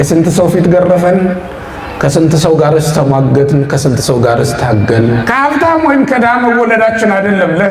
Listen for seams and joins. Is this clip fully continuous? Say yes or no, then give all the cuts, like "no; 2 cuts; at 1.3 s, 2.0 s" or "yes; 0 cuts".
no; 1 cut; at 5.2 s